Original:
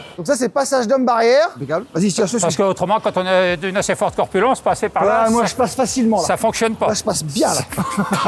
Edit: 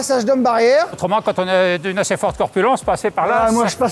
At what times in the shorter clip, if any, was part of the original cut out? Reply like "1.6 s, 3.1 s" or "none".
1.0 s